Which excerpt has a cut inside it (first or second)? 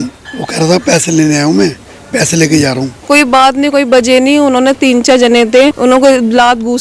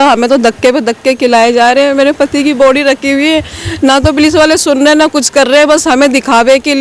first